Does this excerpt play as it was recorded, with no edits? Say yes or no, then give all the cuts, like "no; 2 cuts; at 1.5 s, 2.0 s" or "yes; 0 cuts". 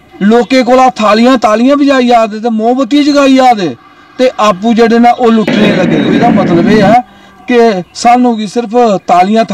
no; 1 cut; at 6.0 s